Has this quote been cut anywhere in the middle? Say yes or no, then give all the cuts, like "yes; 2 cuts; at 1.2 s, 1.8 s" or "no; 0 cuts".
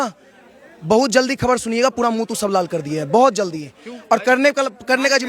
no; 0 cuts